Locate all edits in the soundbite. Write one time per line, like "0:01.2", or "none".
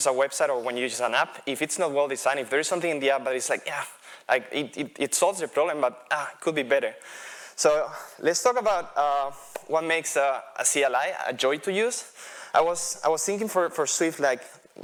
none